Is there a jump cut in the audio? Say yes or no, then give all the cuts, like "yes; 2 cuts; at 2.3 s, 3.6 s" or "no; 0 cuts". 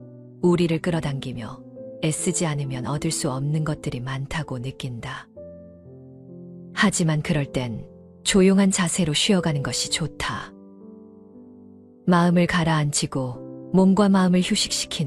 yes; 4 cuts; at 5.3 s, 6.7 s, 10.4 s, 11.8 s